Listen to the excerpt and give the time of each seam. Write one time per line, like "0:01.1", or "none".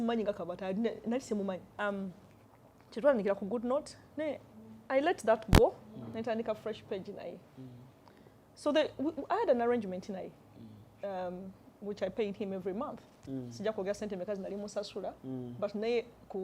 0:01.7